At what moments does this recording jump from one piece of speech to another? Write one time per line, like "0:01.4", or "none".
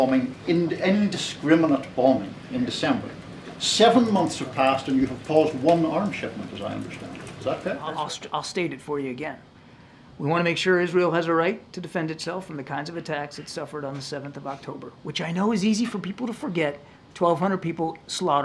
0:07.9